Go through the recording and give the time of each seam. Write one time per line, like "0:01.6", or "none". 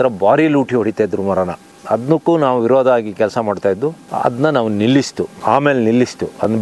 none